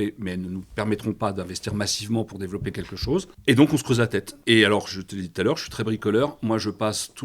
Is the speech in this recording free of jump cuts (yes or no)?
no